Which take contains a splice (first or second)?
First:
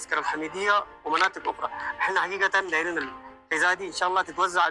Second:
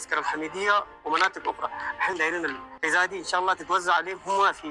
second